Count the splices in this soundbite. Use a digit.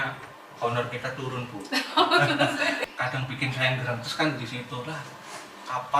1